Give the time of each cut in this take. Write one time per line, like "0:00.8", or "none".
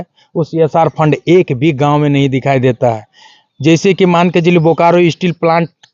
none

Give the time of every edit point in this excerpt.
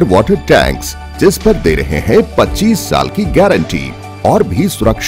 none

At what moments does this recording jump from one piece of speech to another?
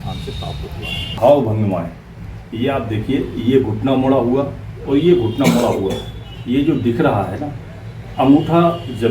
0:01.2

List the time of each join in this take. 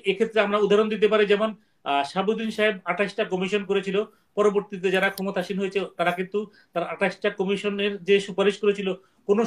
none

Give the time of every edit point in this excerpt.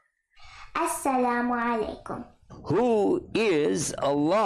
none

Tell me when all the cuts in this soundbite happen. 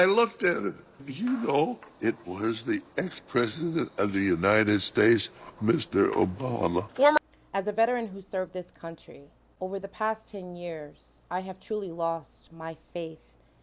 0:07.2

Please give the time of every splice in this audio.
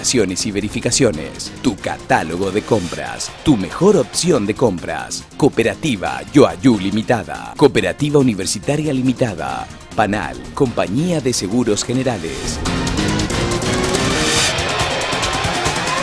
none

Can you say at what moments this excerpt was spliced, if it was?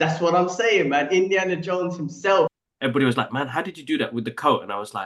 0:02.5

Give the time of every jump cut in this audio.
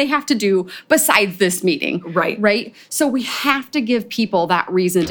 none

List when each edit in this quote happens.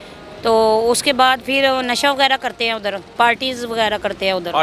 0:03.1

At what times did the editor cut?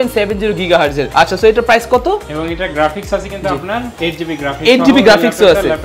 0:01.0

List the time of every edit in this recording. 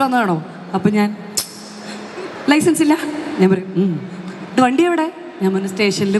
none

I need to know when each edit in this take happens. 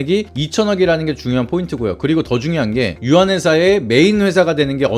none

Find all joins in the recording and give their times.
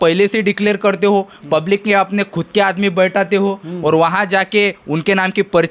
none

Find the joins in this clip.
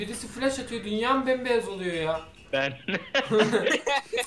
none

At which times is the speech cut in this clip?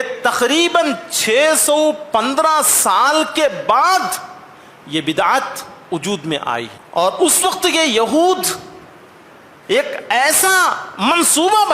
0:06.8

